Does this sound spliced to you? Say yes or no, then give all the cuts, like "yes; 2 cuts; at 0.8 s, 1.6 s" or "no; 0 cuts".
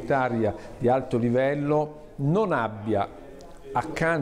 no; 0 cuts